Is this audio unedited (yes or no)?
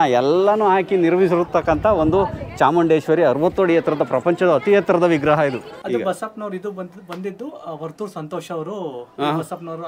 no